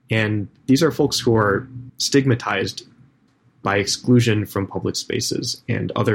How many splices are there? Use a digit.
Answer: 1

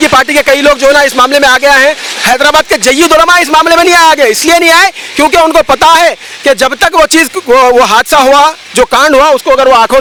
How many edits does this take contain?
0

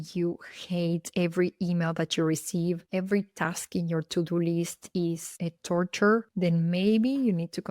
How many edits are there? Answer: 1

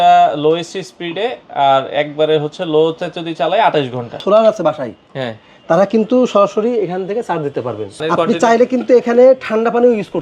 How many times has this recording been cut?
2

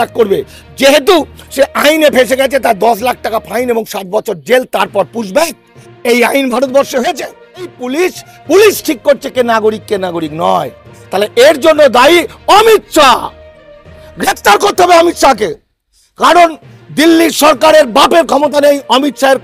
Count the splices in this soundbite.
1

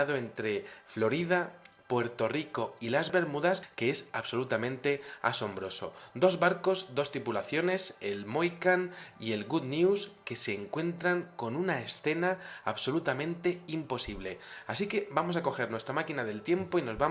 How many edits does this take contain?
1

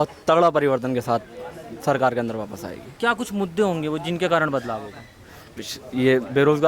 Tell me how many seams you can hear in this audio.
0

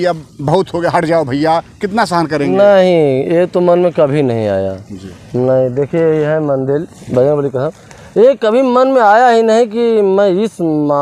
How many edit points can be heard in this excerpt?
0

